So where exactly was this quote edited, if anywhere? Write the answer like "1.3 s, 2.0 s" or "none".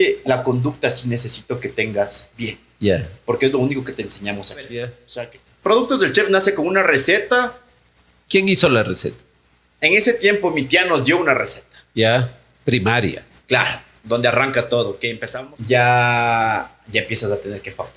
5.0 s, 15.1 s

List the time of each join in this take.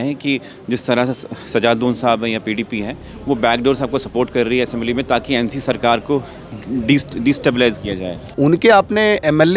8.3 s

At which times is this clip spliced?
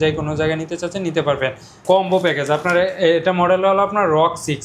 1.8 s

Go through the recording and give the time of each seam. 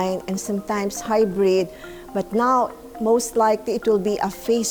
none

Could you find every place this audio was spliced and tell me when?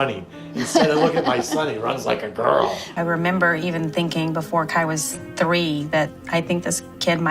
2.8 s

